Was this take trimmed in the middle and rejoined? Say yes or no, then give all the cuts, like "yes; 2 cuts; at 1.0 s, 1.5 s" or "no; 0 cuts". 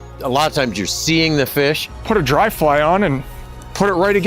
yes; 1 cut; at 1.9 s